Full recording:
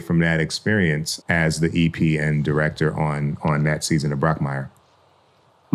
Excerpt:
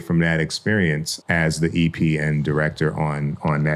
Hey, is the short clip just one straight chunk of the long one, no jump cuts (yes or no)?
yes